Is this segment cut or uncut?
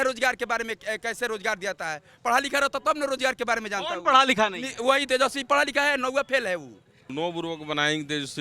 cut